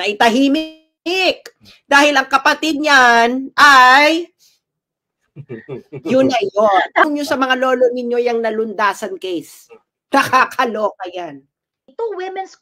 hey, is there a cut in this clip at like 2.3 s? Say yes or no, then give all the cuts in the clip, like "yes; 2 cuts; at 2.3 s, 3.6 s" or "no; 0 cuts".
no; 1 cut; at 7.1 s